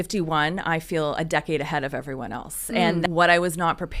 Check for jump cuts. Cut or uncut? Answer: cut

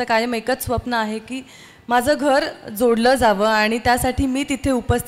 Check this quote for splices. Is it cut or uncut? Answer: uncut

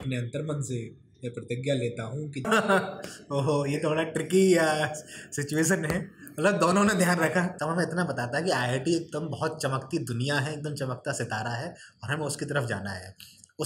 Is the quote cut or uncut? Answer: cut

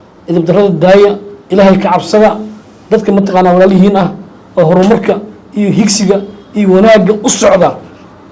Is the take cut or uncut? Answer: uncut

